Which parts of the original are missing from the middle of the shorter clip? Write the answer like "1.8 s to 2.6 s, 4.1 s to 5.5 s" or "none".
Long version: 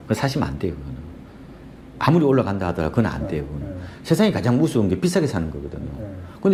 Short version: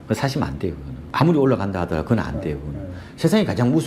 0.9 s to 1.8 s